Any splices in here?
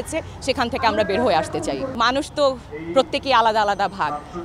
no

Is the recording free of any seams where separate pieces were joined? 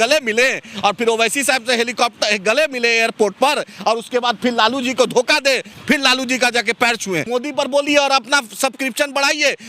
no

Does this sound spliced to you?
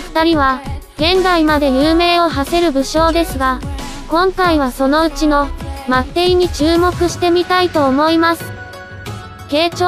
yes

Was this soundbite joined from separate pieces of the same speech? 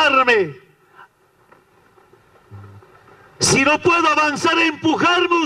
yes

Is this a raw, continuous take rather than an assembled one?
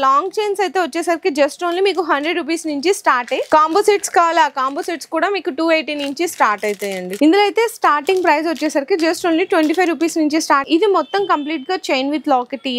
no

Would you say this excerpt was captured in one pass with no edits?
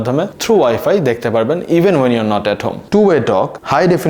no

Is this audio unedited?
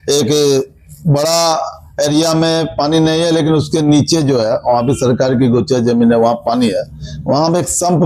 yes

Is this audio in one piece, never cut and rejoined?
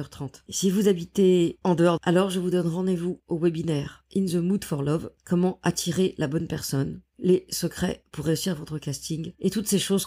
no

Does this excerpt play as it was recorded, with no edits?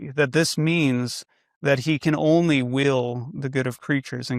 yes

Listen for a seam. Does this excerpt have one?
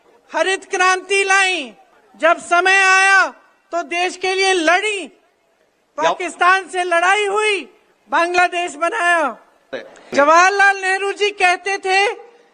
yes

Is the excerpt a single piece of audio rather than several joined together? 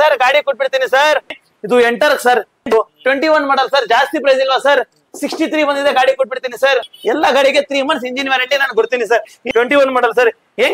no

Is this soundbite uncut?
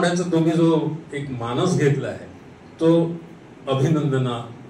yes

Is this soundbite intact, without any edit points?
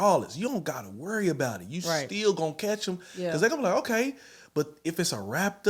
yes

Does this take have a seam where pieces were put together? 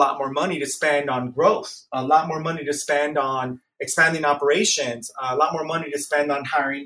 no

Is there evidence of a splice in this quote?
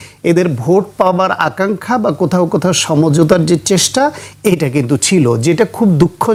no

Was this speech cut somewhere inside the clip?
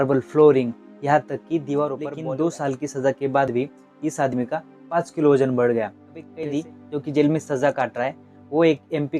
yes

